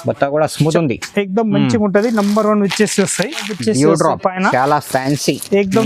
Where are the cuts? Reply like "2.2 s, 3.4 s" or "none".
3.6 s